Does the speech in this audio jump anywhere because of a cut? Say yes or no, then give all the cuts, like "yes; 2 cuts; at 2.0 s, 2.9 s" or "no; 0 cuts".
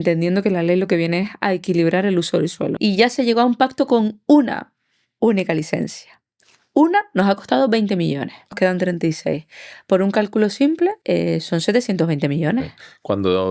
yes; 3 cuts; at 2.8 s, 8.6 s, 11.0 s